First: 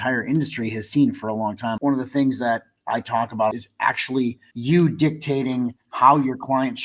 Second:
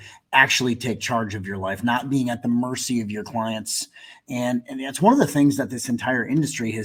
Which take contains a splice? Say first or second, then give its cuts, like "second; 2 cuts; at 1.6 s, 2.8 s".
first; 3 cuts; at 1.8 s, 3.5 s, 4.5 s